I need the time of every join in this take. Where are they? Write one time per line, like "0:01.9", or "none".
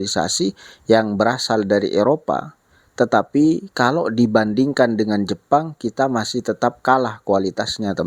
none